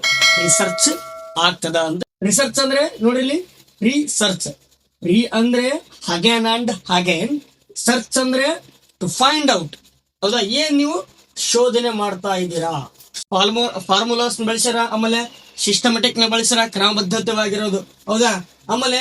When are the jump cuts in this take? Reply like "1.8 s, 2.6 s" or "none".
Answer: 2.0 s, 13.3 s